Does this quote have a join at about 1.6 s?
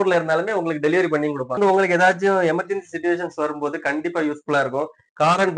yes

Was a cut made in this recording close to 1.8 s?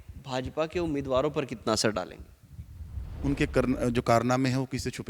no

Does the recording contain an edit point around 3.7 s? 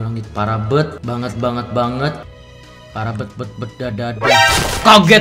no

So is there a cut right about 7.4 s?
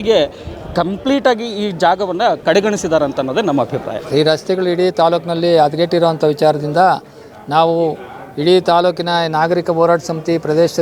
no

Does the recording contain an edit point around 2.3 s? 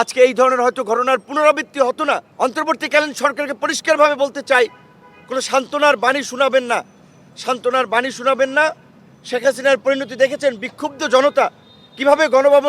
yes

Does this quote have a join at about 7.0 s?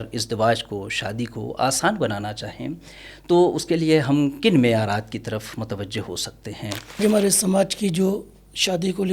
yes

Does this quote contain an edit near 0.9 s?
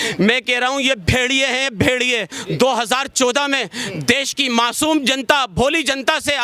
no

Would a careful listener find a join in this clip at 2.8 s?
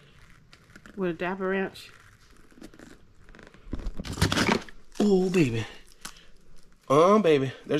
no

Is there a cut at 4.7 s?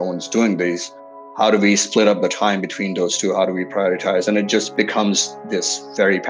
yes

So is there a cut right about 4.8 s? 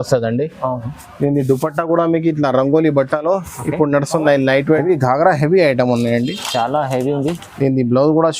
yes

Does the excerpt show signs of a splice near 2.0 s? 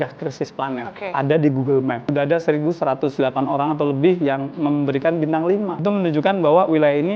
yes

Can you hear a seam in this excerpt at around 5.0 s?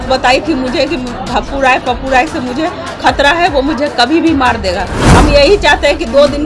yes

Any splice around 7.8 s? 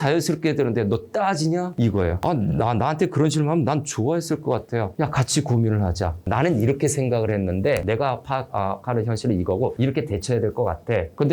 yes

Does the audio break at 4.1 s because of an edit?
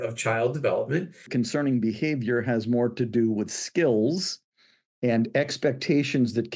no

